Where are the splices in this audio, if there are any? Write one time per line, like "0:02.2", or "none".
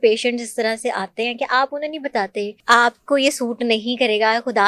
0:02.6